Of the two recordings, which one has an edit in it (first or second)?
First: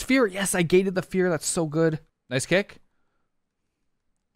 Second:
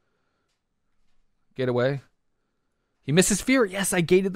first